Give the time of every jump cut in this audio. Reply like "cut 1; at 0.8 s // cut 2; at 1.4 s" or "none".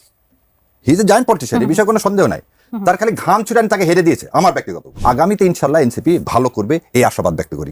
cut 1; at 4.9 s